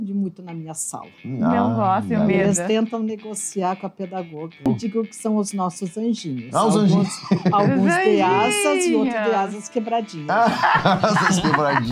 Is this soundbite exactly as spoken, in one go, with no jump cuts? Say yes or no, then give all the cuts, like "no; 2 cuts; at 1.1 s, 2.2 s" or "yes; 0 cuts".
no; 1 cut; at 4.7 s